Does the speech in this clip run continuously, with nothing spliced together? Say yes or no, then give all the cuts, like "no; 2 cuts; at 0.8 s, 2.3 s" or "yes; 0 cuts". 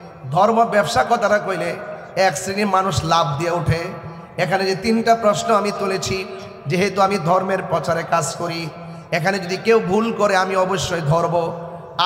yes; 0 cuts